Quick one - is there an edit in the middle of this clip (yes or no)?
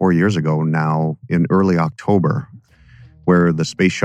yes